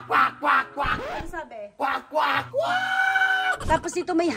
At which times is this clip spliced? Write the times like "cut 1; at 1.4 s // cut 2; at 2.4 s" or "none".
cut 1; at 1.0 s // cut 2; at 3.6 s